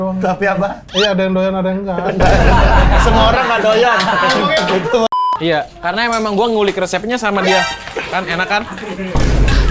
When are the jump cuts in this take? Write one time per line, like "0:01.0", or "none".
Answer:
0:05.1

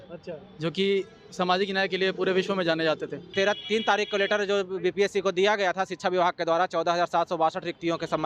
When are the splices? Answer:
0:03.3

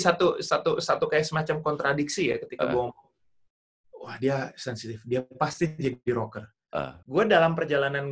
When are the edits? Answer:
0:07.0

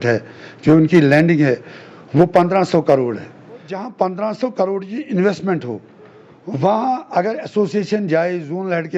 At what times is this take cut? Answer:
0:03.7

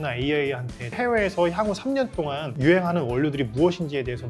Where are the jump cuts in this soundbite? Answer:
0:00.9

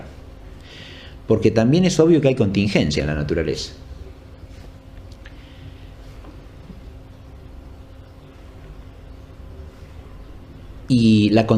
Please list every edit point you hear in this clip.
0:07.4

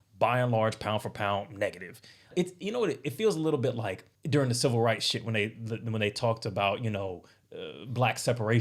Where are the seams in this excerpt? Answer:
0:02.3
0:04.1

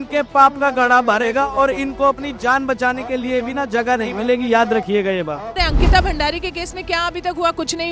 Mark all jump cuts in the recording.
0:05.6

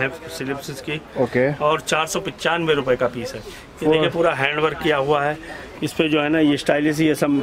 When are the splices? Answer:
none

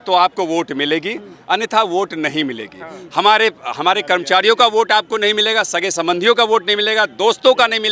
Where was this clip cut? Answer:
none

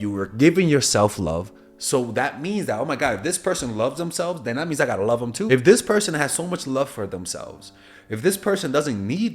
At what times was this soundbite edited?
0:05.5

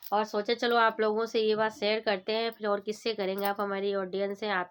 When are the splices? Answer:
none

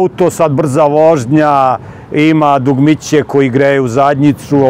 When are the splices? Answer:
none

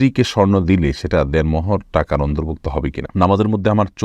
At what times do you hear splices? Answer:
0:03.0

